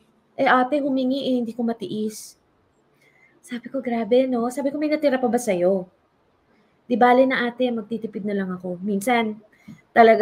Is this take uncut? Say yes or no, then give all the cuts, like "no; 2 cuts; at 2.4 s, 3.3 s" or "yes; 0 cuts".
yes; 0 cuts